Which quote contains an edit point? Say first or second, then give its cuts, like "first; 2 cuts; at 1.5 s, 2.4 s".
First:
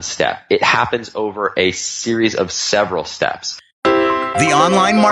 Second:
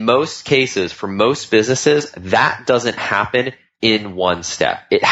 first; 1 cut; at 3.6 s